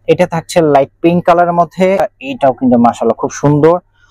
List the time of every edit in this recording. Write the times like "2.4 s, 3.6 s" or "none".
2.0 s